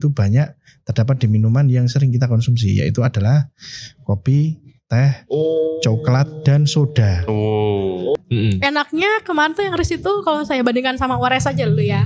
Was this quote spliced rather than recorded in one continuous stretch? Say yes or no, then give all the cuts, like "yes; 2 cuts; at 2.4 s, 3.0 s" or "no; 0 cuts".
yes; 1 cut; at 8.2 s